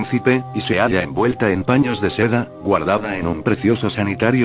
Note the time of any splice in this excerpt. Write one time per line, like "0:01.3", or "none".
none